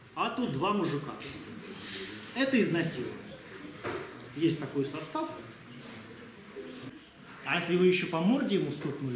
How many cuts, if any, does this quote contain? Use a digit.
1